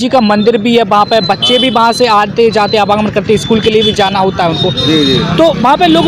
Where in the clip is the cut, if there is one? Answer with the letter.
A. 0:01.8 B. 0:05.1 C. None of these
C